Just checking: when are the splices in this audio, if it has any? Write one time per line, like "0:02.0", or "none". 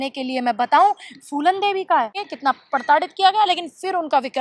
0:02.2